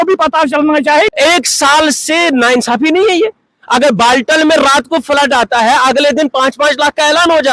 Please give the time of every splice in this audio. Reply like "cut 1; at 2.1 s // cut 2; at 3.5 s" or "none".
cut 1; at 1.1 s